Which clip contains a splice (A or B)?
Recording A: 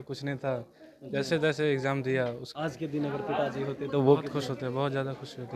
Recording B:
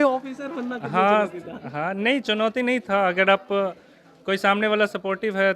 A